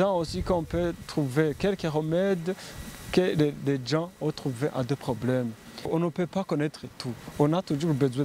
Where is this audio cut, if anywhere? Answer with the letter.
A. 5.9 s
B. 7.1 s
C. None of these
A